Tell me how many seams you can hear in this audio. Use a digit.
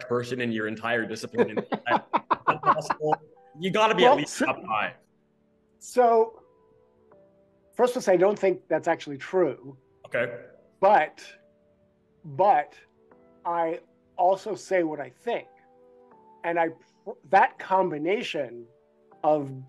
0